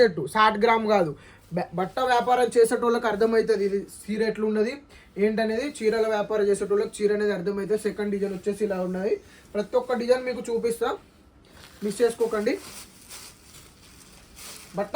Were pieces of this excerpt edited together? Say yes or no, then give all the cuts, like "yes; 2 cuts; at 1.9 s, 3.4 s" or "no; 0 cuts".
no; 0 cuts